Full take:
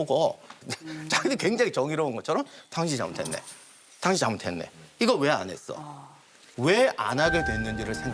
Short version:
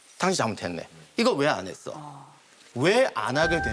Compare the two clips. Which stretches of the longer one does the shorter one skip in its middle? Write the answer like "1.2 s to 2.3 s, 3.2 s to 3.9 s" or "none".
none